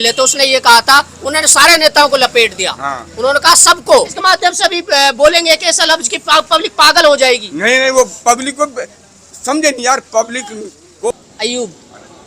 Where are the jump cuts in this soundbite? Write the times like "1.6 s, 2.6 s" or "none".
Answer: 4.2 s, 11.1 s